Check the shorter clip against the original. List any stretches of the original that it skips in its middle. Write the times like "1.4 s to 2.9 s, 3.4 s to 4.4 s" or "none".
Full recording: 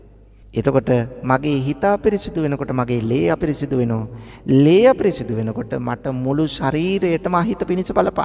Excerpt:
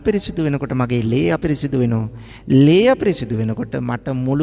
none

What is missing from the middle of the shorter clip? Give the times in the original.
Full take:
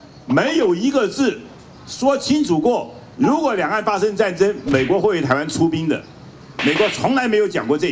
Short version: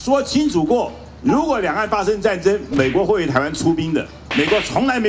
6.1 s to 6.5 s

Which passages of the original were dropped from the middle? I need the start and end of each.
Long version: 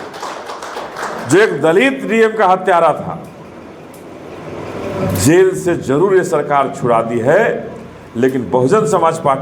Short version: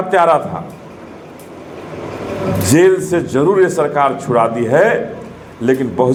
none

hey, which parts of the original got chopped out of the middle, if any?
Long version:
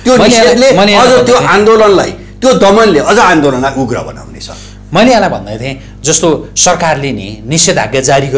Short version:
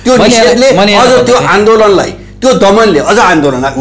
none

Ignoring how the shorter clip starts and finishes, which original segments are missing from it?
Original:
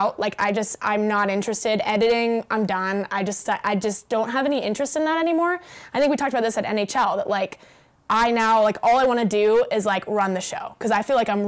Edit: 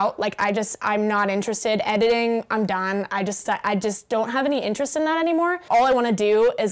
5.6 s to 8.8 s

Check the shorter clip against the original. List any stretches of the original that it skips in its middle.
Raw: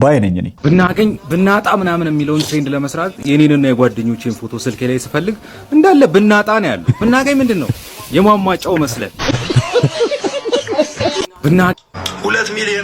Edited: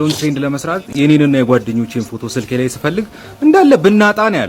none

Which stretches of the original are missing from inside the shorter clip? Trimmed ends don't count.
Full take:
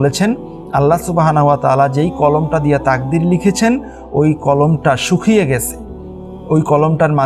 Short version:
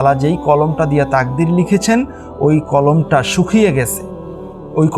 none

